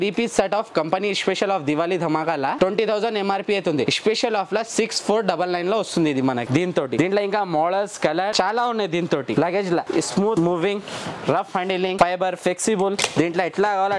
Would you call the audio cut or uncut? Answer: uncut